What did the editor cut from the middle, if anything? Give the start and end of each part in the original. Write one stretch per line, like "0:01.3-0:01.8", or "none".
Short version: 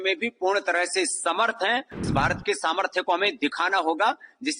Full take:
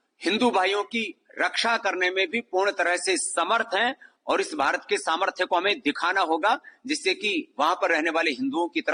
0:04.2-0:04.5